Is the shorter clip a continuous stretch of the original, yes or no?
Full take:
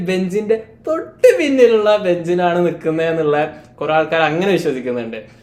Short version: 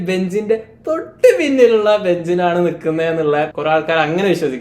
no